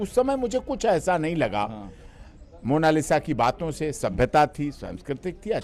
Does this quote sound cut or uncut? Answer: uncut